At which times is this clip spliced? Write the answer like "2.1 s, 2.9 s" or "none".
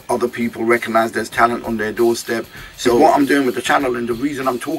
3.0 s